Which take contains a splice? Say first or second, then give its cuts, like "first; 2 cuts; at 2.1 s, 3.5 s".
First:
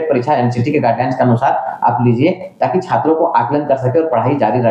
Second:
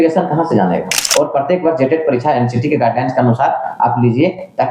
second; 1 cut; at 1.0 s